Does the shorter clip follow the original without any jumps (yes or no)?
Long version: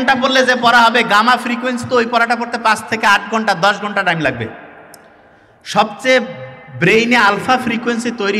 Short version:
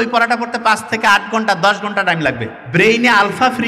no